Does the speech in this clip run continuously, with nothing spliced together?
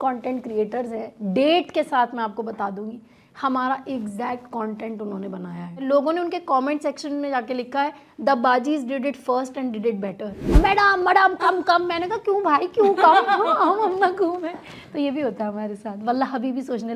no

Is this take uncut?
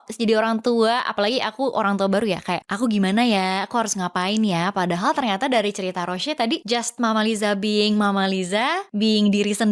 no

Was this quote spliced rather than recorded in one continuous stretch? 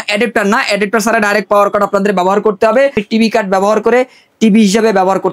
yes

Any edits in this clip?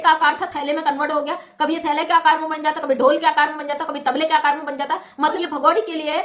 yes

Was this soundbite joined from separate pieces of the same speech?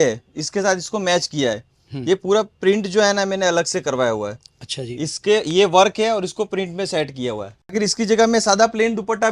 yes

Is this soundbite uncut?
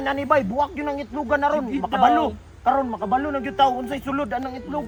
yes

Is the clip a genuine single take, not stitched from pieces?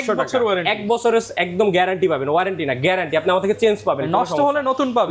yes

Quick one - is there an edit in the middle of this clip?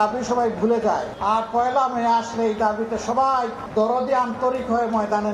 yes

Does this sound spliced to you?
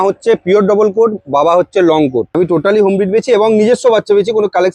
yes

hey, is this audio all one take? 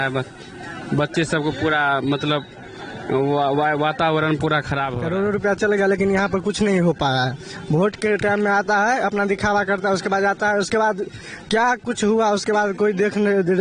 no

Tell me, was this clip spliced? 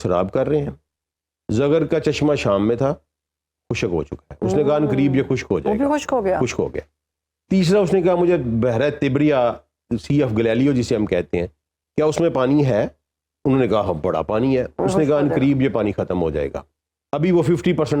no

